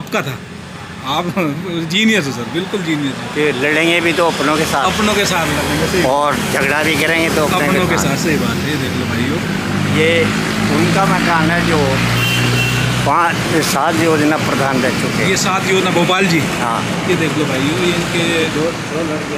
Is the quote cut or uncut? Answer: uncut